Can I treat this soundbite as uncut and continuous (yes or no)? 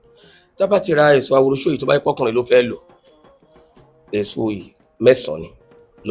yes